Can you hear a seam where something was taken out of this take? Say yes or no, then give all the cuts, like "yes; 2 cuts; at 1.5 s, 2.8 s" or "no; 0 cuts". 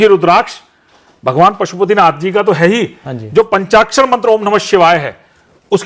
no; 0 cuts